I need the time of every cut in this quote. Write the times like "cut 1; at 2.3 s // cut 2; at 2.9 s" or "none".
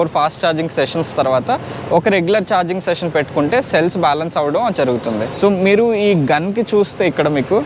none